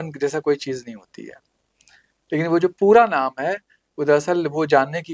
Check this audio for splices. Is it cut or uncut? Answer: uncut